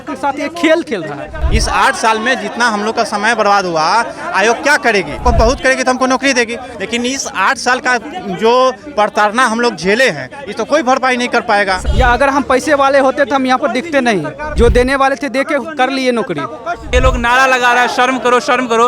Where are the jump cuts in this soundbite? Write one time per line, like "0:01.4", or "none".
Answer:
0:01.3
0:05.2
0:11.9
0:14.4
0:16.8